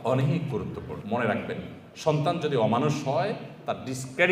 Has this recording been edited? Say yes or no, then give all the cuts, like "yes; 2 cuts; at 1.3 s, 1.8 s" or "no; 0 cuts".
yes; 1 cut; at 1.0 s